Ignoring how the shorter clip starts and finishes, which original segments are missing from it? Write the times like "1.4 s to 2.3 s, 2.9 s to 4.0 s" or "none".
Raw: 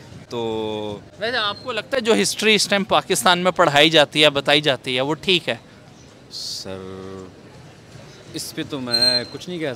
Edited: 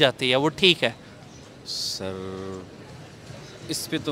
none